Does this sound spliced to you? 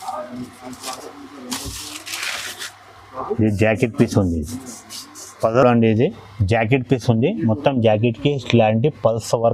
no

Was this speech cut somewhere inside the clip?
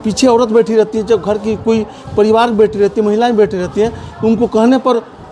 no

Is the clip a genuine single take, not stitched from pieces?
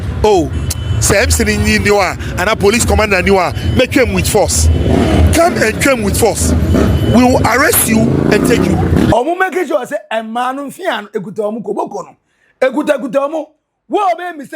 no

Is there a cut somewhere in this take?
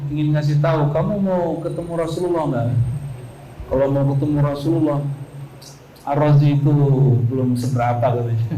no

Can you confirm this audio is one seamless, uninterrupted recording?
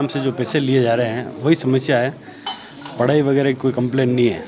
yes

